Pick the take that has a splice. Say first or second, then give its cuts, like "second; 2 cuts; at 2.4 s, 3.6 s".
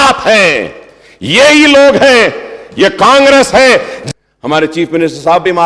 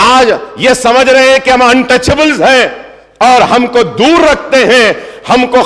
first; 1 cut; at 4.0 s